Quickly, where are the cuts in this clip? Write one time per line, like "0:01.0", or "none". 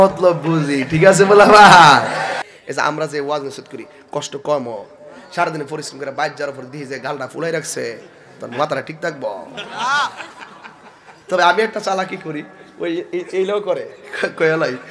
0:02.4